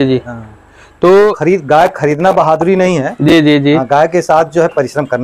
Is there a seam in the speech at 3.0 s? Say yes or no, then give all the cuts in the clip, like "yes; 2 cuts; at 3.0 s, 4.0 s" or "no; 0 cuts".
no; 1 cut; at 1.4 s